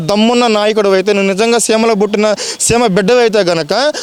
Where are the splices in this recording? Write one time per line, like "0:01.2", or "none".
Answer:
none